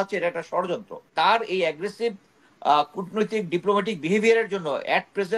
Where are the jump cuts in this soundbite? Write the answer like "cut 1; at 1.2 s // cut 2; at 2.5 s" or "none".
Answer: cut 1; at 1.1 s